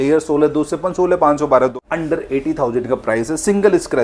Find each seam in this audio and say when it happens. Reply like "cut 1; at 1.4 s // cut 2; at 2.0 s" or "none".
cut 1; at 1.7 s

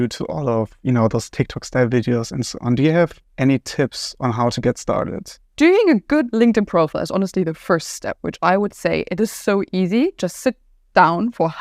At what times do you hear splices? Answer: cut 1; at 5.4 s

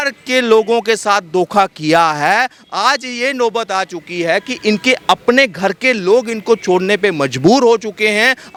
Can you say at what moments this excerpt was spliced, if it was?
none

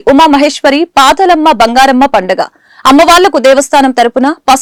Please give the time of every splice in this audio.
none

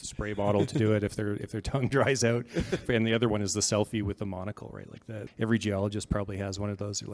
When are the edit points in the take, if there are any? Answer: cut 1; at 2.8 s // cut 2; at 5.1 s

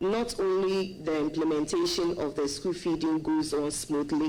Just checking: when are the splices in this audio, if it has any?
none

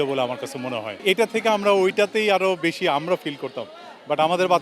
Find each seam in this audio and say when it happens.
cut 1; at 1.0 s

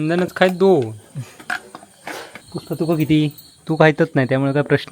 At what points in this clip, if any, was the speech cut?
cut 1; at 2.4 s

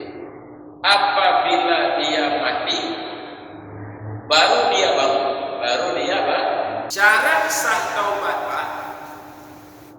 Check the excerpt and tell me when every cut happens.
cut 1; at 6.9 s

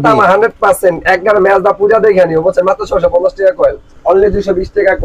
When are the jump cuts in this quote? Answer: cut 1; at 3.8 s

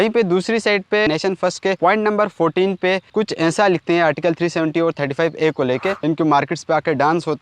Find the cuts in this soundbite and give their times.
cut 1; at 1.1 s // cut 2; at 6.0 s

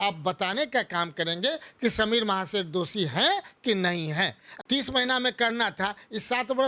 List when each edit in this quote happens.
cut 1; at 4.5 s

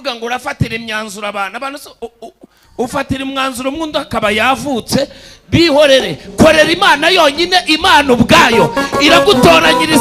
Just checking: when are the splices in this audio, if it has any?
none

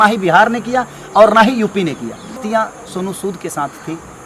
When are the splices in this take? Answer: cut 1; at 2.4 s

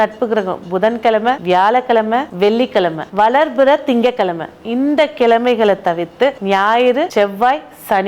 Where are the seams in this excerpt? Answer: cut 1; at 1.4 s // cut 2; at 2.5 s // cut 3; at 6.4 s // cut 4; at 7.1 s

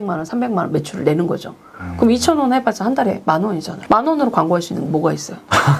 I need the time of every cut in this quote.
cut 1; at 3.7 s

